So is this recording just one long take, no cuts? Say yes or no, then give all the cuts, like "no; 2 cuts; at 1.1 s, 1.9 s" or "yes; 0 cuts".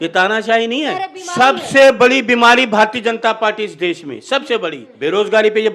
no; 2 cuts; at 1.2 s, 4.8 s